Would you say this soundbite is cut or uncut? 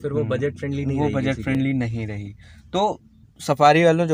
uncut